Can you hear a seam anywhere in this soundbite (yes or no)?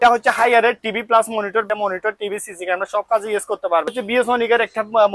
yes